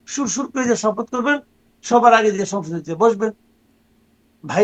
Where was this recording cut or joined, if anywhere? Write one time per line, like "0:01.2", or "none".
none